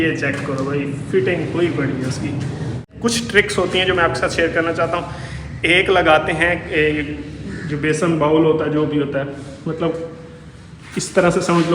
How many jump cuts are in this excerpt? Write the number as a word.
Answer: one